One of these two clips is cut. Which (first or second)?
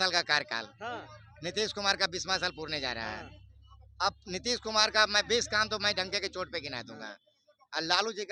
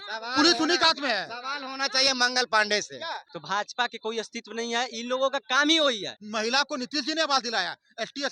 second